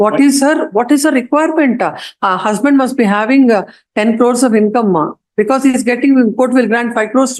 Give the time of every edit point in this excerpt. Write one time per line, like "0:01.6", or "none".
none